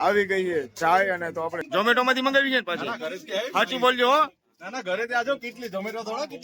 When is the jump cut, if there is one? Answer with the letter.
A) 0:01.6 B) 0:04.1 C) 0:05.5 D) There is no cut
A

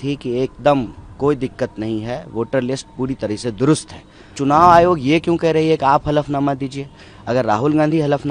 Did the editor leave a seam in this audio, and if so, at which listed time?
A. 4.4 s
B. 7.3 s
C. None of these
A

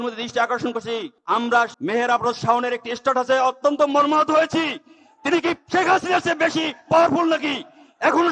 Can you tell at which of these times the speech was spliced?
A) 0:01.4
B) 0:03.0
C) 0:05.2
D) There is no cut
A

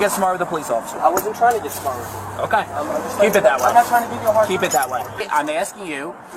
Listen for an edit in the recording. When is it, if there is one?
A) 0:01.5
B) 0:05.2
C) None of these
B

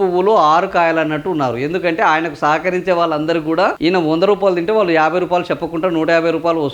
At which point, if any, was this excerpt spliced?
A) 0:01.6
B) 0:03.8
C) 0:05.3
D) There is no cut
B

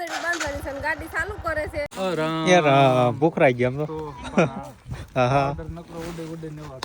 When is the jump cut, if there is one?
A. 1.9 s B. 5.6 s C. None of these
A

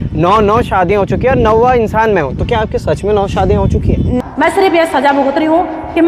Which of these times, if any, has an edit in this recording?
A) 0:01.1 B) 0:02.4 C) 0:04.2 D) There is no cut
C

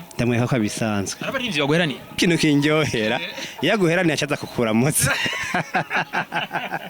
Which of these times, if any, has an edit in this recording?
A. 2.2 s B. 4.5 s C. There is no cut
A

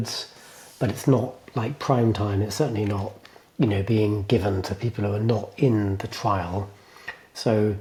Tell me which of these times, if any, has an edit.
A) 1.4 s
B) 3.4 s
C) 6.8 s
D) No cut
D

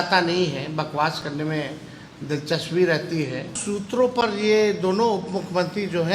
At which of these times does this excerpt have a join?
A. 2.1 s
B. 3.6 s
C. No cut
B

